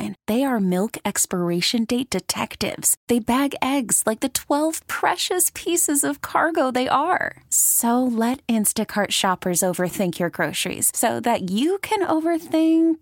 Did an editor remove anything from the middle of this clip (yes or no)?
no